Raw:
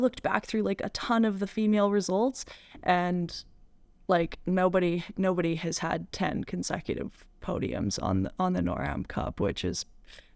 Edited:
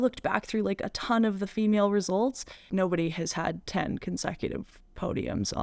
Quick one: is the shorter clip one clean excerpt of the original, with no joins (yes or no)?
no